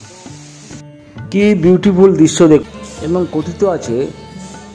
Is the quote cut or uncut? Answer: cut